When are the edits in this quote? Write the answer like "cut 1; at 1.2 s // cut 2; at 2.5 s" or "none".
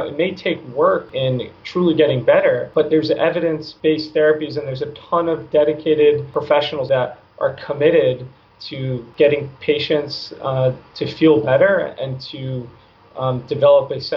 cut 1; at 1.1 s // cut 2; at 2.7 s // cut 3; at 3.7 s // cut 4; at 6.8 s // cut 5; at 9.0 s

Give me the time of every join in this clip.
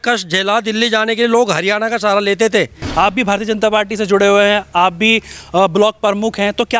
cut 1; at 2.8 s

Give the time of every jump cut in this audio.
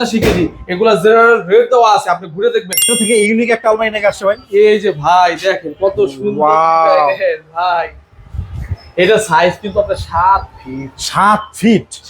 cut 1; at 3.0 s

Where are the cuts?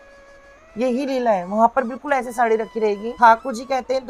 cut 1; at 3.1 s

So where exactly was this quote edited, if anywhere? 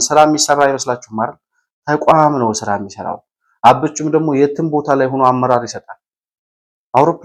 none

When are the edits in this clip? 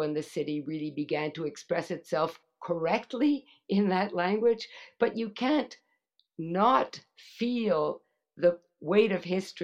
none

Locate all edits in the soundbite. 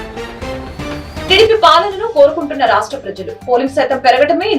cut 1; at 1.3 s

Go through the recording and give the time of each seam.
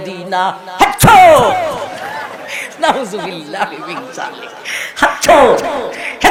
none

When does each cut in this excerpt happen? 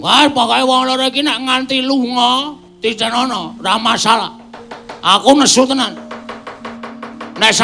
cut 1; at 3.0 s

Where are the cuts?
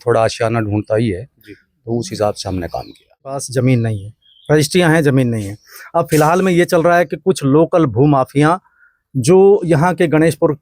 cut 1; at 3.5 s

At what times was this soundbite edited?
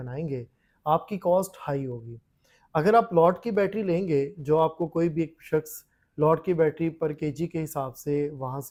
none

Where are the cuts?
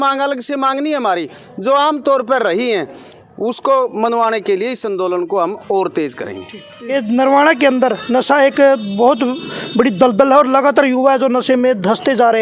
cut 1; at 6.9 s

